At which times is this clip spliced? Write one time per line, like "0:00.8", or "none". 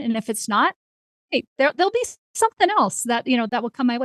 none